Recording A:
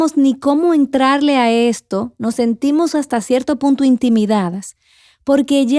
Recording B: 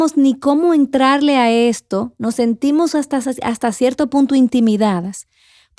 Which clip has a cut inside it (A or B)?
A